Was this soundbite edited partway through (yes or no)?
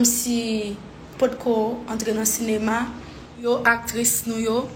yes